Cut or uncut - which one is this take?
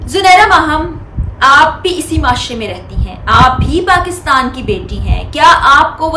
uncut